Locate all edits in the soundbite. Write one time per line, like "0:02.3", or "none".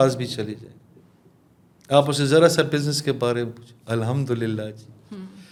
none